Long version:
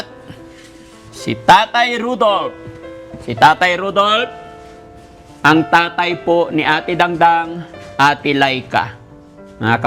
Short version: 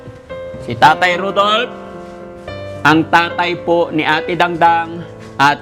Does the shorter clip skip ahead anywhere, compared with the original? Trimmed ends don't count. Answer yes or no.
no